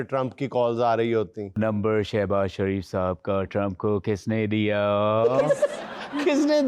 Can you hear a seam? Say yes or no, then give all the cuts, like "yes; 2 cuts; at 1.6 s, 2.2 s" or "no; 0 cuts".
yes; 1 cut; at 1.6 s